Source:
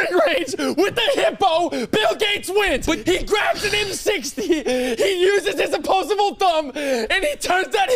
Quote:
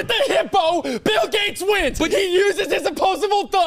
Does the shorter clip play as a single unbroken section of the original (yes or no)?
no